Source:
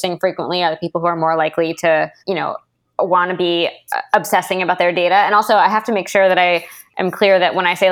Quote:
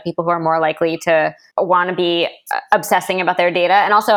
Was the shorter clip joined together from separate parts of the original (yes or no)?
yes